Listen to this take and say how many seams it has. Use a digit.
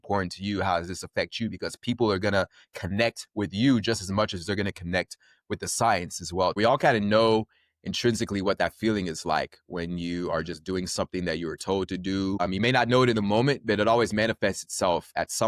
1